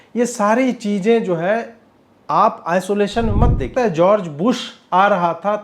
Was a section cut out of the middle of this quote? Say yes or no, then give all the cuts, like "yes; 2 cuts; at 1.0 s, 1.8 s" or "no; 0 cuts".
yes; 1 cut; at 3.7 s